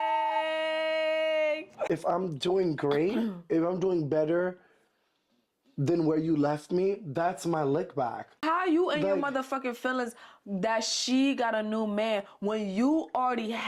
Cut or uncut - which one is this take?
cut